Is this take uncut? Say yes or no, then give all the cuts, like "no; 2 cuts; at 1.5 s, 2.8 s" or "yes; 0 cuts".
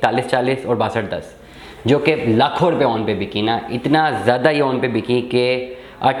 yes; 0 cuts